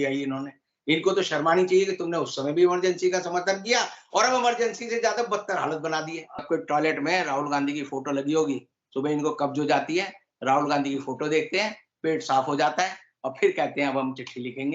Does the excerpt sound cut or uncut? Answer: cut